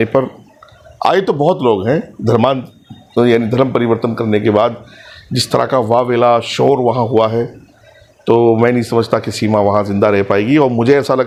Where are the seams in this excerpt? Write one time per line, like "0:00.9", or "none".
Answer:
none